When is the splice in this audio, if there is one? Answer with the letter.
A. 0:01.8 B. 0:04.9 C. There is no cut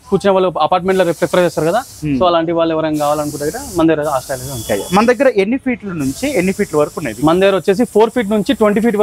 C